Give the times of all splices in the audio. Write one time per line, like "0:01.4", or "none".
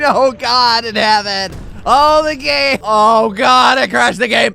0:02.8